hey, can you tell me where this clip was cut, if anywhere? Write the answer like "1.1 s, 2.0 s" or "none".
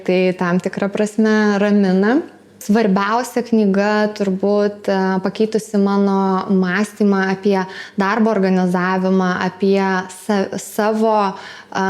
2.6 s